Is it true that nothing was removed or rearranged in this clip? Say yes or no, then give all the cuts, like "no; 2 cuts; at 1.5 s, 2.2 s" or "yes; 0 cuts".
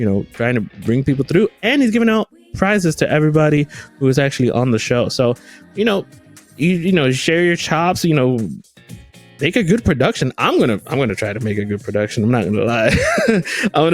yes; 0 cuts